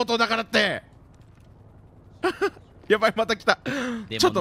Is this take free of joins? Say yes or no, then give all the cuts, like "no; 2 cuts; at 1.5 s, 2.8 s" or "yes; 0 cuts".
yes; 0 cuts